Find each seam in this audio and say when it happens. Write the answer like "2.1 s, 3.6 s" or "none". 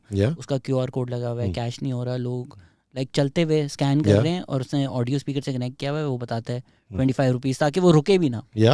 none